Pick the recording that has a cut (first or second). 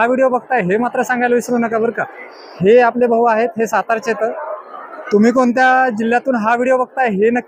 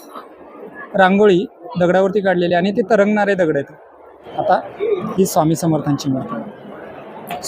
second